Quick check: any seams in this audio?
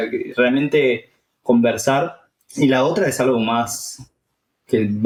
no; 0 cuts

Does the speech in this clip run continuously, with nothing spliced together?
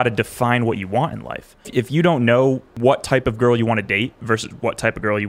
no; 2 cuts; at 1.7 s, 2.7 s

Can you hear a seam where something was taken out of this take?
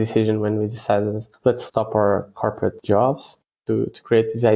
yes; 3 cuts; at 1.3 s, 2.8 s, 3.6 s

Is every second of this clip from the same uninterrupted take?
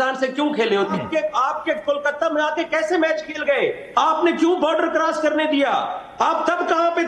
no; 1 cut; at 0.9 s

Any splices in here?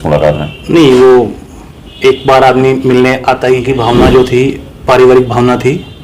yes; 1 cut; at 3.6 s

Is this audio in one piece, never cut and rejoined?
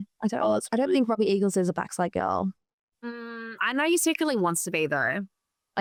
yes; 0 cuts

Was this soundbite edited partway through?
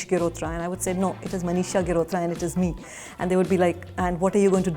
no; 0 cuts

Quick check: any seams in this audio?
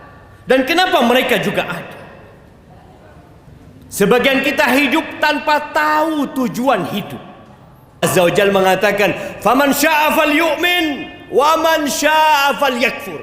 yes; 1 cut; at 8.0 s

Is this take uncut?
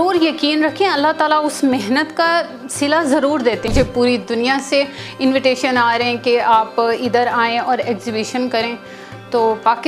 no; 1 cut; at 3.7 s

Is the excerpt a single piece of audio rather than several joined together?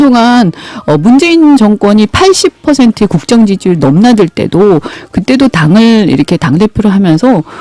yes; 0 cuts

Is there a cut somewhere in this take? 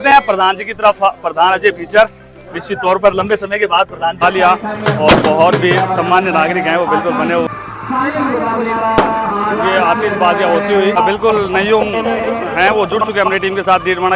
yes; 3 cuts; at 4.2 s, 7.5 s, 10.9 s

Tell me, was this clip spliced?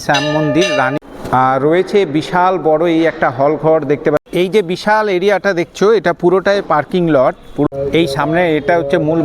yes; 3 cuts; at 1.0 s, 4.2 s, 7.7 s

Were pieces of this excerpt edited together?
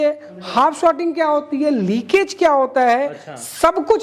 no; 0 cuts

